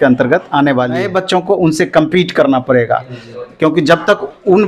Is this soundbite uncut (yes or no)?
no